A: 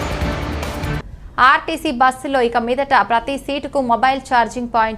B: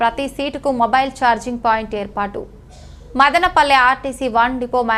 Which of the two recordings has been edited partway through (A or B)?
A